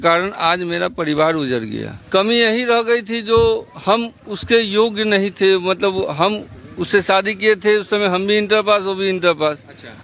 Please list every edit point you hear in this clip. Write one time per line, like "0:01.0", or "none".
0:01.9